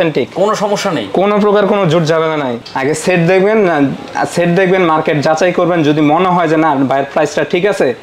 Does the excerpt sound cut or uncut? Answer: cut